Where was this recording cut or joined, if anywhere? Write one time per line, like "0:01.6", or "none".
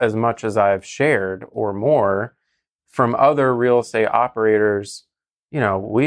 none